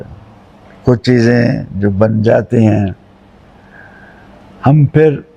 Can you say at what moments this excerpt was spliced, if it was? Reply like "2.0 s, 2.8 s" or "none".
none